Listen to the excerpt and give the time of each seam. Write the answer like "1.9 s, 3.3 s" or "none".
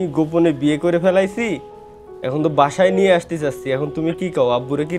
none